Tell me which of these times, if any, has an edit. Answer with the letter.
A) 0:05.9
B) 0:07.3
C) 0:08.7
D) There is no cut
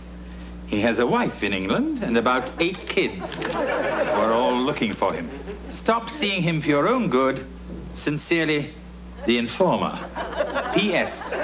B